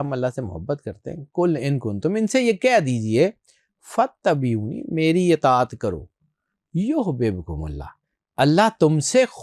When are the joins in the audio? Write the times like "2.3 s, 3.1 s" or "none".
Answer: none